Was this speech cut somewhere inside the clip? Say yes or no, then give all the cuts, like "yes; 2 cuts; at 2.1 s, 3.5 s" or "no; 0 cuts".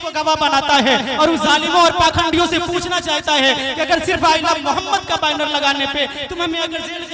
no; 0 cuts